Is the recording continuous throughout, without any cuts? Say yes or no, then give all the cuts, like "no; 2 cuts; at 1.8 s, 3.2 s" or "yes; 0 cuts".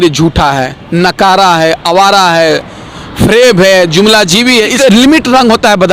no; 1 cut; at 4.7 s